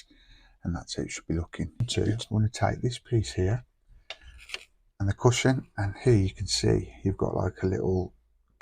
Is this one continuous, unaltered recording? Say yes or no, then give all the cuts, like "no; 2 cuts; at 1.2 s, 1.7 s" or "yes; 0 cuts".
no; 1 cut; at 1.9 s